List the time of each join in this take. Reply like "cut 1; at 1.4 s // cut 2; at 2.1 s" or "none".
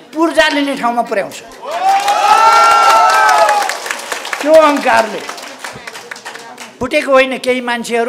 cut 1; at 6.7 s